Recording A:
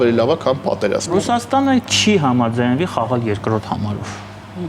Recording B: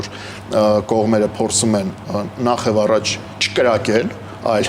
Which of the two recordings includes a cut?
A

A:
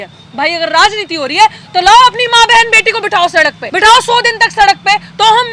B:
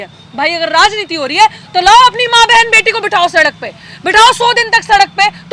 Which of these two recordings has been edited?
A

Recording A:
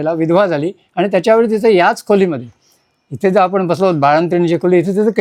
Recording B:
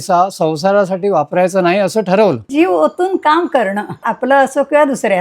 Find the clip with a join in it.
B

